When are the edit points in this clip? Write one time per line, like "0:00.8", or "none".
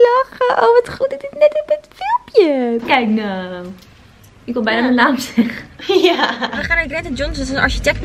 0:02.8
0:06.6